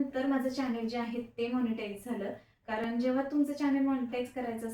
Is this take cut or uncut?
uncut